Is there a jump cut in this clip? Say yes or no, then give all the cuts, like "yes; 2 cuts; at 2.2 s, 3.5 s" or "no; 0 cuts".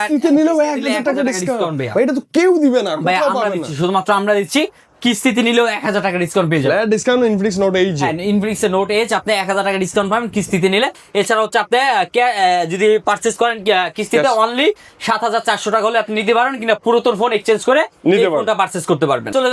no; 0 cuts